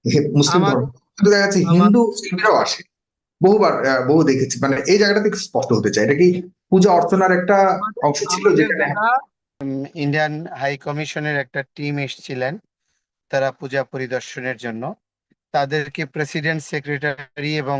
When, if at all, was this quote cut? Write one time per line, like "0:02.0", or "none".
0:09.5